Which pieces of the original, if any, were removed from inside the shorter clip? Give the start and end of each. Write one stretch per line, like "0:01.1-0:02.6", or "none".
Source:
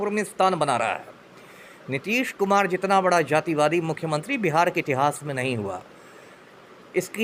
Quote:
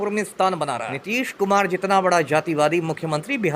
0:00.9-0:01.9